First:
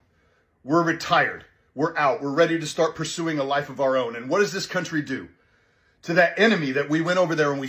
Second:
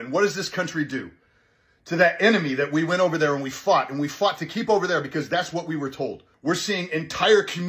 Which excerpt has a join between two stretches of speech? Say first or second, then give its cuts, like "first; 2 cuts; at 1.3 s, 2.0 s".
second; 1 cut; at 6.3 s